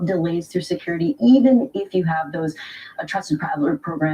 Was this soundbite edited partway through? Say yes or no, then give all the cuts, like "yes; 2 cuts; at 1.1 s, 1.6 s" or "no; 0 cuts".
yes; 1 cut; at 3.2 s